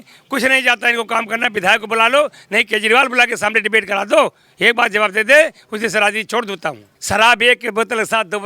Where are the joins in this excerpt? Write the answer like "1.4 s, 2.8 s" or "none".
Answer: 6.9 s

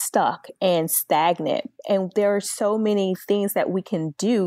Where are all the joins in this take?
none

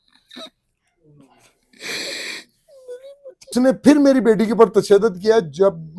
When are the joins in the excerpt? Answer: 3.4 s

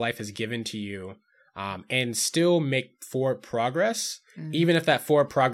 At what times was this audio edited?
none

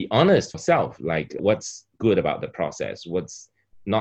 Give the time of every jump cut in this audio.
0.9 s

